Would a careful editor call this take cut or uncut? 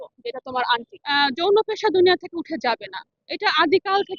cut